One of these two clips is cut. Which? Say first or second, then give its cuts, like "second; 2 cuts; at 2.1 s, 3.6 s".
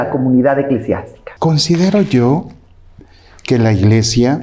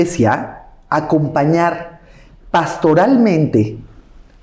first; 1 cut; at 1.2 s